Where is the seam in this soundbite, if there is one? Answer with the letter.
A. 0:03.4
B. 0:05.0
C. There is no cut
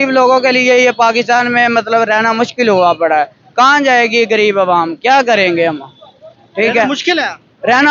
C